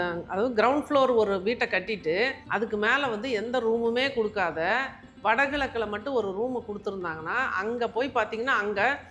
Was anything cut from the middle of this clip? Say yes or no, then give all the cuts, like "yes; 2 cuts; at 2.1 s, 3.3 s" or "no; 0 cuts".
yes; 1 cut; at 2.4 s